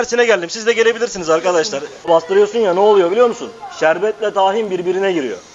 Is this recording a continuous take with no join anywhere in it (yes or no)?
no